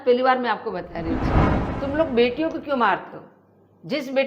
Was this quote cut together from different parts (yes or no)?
yes